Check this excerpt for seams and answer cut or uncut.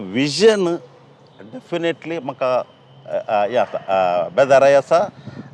uncut